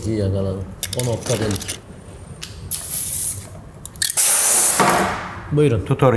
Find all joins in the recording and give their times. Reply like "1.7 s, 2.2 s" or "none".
1.8 s